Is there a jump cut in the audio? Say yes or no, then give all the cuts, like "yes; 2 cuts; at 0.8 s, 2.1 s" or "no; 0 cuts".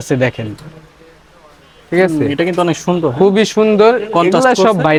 no; 0 cuts